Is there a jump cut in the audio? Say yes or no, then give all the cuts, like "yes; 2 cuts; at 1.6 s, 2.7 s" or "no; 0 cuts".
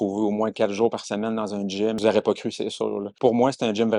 yes; 2 cuts; at 2.0 s, 3.1 s